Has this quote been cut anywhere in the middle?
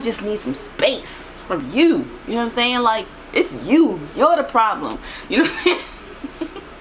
no; 0 cuts

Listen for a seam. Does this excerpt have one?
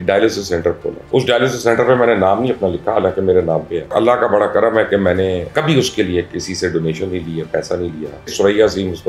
yes; 4 cuts; at 1.0 s, 3.9 s, 5.5 s, 8.3 s

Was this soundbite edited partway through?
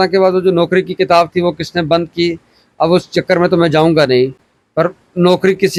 no; 0 cuts

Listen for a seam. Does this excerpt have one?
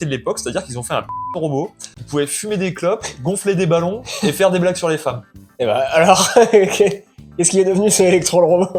yes; 1 cut; at 5.3 s

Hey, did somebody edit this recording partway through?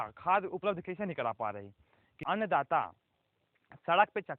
yes; 1 cut; at 2.2 s

